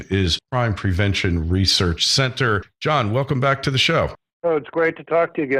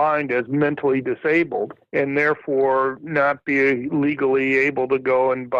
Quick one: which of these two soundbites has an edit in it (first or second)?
first